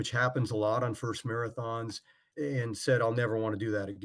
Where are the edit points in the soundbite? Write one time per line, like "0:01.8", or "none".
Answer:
0:02.2

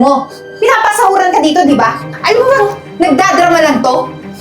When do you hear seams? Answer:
0:02.1

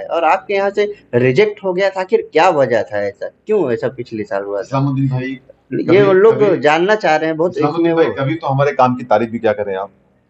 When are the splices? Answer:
none

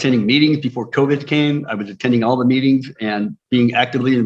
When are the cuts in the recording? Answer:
none

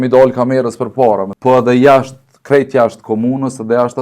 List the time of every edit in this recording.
0:01.3

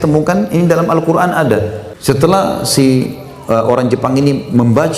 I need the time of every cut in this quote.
0:01.8

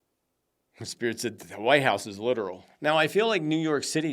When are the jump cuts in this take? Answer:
0:02.6

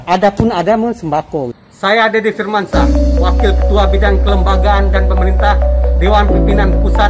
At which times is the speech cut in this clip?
0:01.6

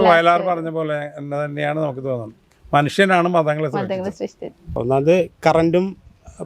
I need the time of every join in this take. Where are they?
0:04.8

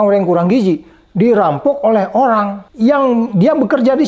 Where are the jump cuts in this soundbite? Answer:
0:02.6
0:03.3

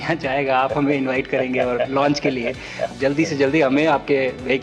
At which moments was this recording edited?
0:02.9

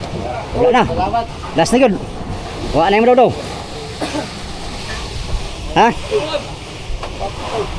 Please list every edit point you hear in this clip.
0:04.8

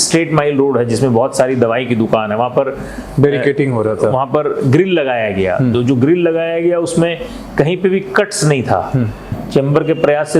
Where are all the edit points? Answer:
0:09.4

